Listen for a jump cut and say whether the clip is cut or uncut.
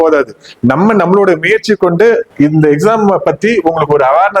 cut